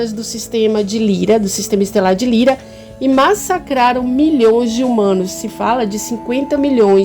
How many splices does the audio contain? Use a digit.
0